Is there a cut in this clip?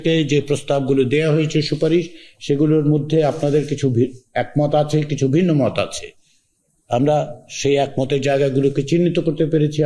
no; 0 cuts

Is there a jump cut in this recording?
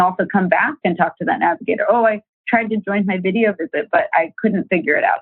no; 0 cuts

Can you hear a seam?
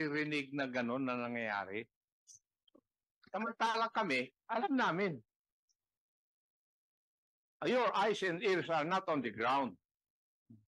no; 0 cuts

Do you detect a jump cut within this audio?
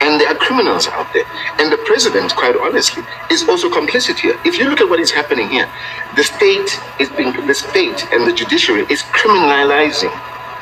no; 0 cuts

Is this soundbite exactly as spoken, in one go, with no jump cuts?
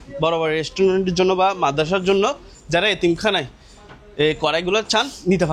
yes; 0 cuts

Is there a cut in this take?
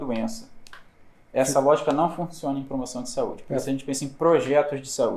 no; 0 cuts

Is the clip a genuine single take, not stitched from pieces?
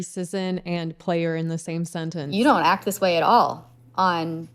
no; 1 cut; at 2.2 s

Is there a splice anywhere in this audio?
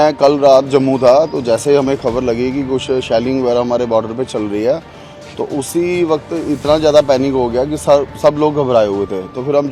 no; 0 cuts

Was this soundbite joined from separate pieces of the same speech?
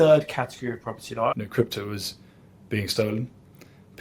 yes; 1 cut; at 1.3 s

